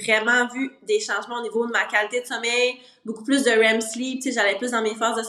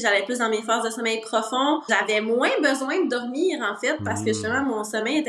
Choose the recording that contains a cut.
second; 1 cut; at 1.9 s

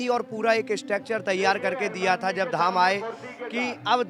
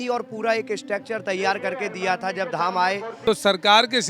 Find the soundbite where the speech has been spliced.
second; 1 cut; at 3.1 s

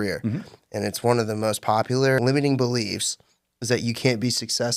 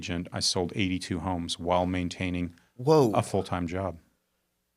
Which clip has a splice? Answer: first; 1 cut; at 2.2 s

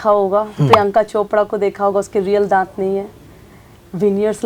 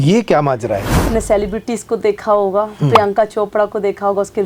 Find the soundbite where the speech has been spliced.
second; 1 cut; at 1.0 s

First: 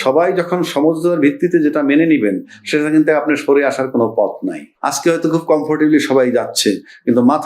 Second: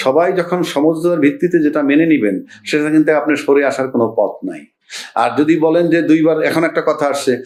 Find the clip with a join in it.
first; 1 cut; at 4.7 s

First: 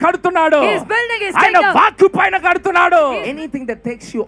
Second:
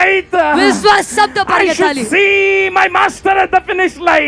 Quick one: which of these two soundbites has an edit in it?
first; 1 cut; at 3.3 s

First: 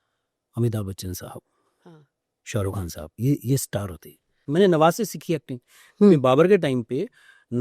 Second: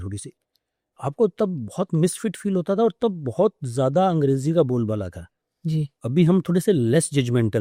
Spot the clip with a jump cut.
first; 1 cut; at 4.2 s

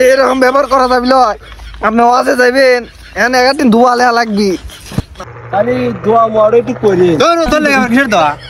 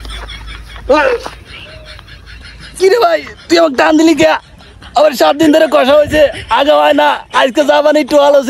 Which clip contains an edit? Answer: first; 1 cut; at 5.2 s

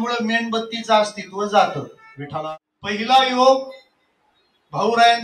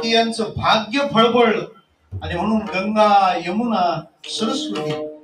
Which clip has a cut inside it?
first; 1 cut; at 2.6 s

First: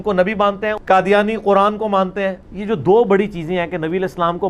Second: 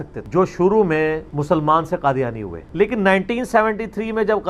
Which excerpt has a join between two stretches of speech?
first; 2 cuts; at 0.8 s, 2.4 s

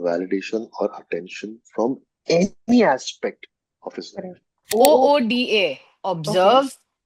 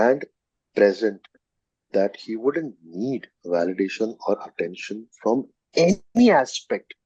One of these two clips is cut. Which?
first; 1 cut; at 4.7 s

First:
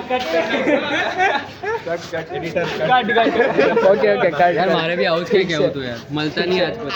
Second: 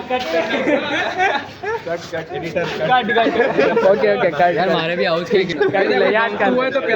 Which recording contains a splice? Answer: second; 1 cut; at 5.5 s

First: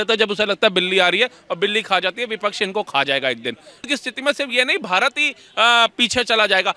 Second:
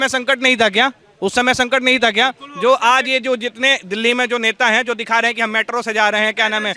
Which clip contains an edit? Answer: first; 1 cut; at 3.8 s

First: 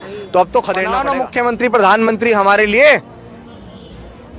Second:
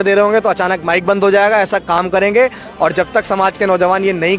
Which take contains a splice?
first; 1 cut; at 1.0 s

